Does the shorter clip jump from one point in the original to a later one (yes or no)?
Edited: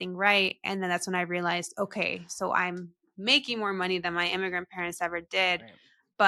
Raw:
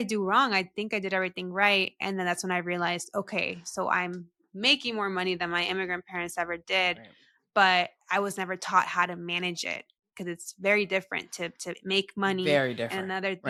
no